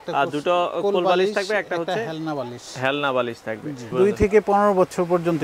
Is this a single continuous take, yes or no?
no